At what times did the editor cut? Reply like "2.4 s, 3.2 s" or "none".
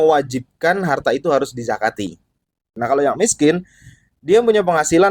2.7 s